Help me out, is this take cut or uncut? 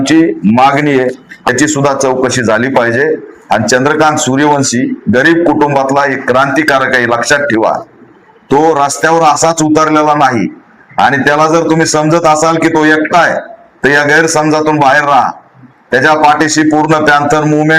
cut